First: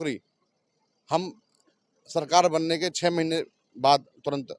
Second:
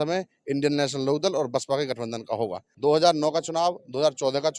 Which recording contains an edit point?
second; 1 cut; at 2.7 s

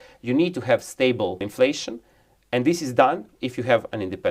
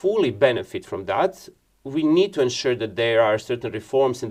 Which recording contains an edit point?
first; 1 cut; at 1.5 s

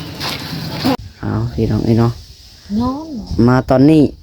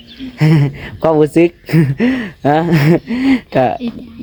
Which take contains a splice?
first; 1 cut; at 1.0 s

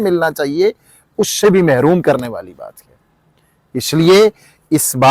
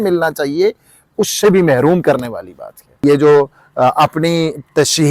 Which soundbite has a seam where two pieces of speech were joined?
second; 1 cut; at 3.0 s

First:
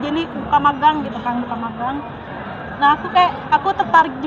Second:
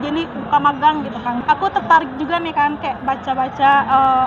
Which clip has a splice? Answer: second; 1 cut; at 1.4 s

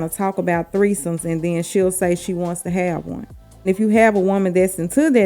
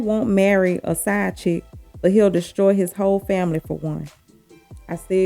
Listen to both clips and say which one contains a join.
first; 1 cut; at 3.7 s

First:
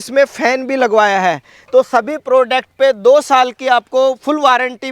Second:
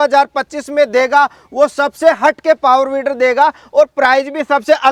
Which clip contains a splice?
first; 1 cut; at 1.5 s

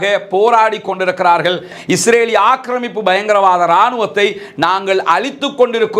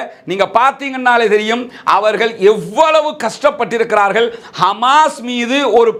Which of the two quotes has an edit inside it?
first; 1 cut; at 1.7 s

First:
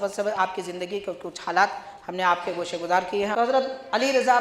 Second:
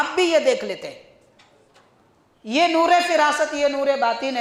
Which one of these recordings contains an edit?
first; 1 cut; at 3.3 s

